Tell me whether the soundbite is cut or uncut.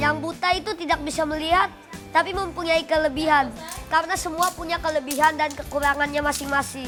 uncut